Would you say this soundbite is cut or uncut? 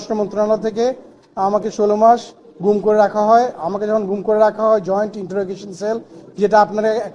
uncut